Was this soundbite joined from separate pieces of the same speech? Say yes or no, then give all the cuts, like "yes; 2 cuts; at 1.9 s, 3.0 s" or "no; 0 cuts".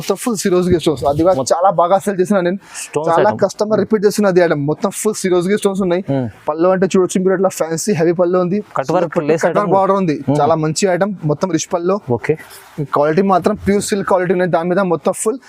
yes; 1 cut; at 8.7 s